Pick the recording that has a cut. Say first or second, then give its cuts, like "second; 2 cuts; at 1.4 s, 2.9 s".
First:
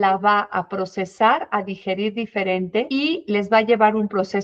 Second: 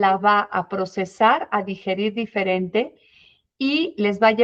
first; 1 cut; at 2.9 s